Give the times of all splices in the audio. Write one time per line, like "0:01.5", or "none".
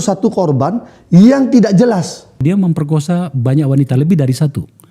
0:02.4